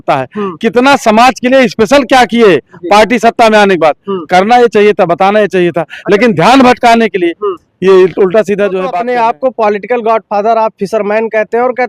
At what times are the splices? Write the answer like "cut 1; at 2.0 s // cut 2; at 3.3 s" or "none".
cut 1; at 8.9 s